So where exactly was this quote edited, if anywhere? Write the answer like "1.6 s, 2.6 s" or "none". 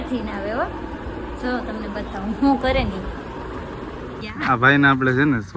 4.2 s